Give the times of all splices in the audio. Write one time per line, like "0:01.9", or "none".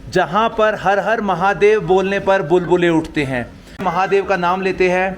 0:04.0